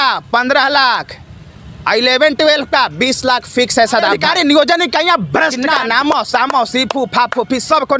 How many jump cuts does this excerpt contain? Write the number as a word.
two